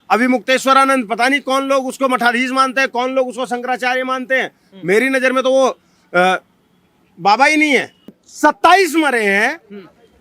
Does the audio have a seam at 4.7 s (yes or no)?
no